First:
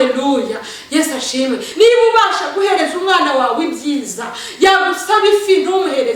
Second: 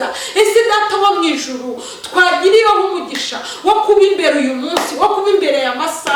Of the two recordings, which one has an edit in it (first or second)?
first